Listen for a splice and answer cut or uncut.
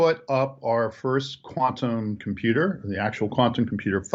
uncut